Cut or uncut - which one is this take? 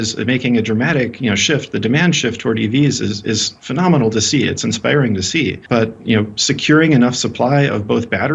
cut